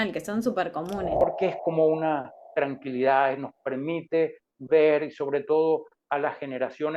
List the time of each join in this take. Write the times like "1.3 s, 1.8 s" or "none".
1.1 s